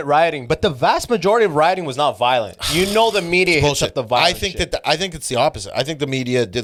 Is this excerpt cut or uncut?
uncut